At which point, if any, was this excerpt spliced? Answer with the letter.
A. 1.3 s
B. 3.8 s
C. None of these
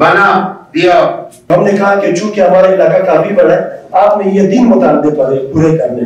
A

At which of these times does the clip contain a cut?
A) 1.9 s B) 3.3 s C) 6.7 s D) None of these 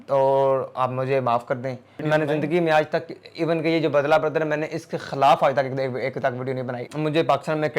A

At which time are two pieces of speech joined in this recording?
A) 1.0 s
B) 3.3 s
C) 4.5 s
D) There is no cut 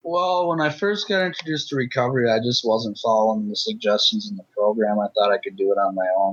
D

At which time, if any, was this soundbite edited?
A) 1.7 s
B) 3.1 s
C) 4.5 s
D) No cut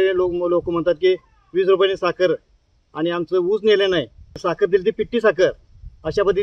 C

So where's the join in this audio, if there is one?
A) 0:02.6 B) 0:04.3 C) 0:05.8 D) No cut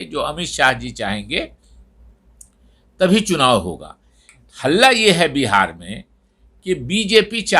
D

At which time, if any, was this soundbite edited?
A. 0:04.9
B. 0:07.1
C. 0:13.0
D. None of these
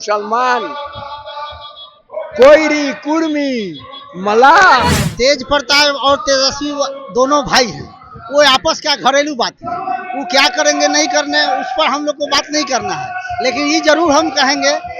A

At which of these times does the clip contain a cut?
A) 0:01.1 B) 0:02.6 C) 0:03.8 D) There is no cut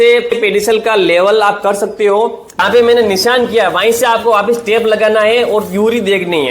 B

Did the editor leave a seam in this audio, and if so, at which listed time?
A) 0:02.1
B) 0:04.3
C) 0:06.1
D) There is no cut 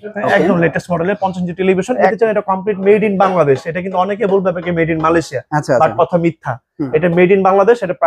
A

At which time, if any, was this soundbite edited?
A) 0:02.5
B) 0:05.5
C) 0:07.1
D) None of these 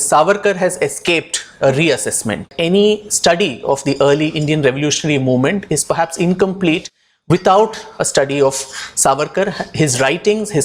A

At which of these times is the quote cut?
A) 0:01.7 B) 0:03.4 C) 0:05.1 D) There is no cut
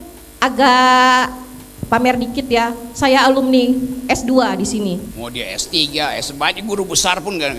C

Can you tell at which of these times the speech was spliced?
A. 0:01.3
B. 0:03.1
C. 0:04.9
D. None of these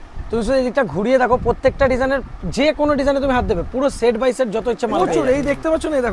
C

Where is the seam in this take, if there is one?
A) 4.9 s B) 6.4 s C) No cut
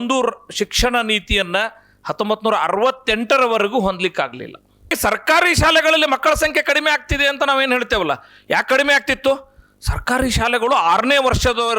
A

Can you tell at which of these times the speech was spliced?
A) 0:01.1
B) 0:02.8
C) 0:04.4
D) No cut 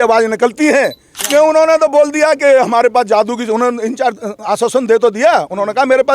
A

